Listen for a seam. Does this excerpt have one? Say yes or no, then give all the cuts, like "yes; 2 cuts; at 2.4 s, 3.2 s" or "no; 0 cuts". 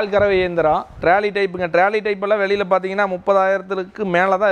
yes; 1 cut; at 1.0 s